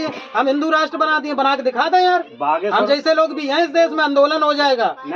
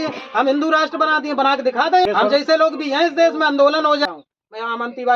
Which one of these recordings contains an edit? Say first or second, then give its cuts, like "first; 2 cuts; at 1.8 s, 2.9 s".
second; 2 cuts; at 2.0 s, 4.0 s